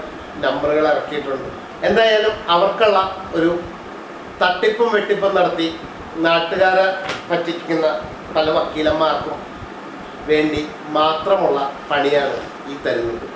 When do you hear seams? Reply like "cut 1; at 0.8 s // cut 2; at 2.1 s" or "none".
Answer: none